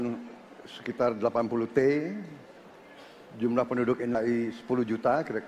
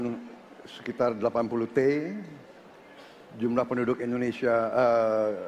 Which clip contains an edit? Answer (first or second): first